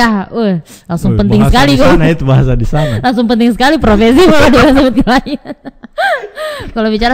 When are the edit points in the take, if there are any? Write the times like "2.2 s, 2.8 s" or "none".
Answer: none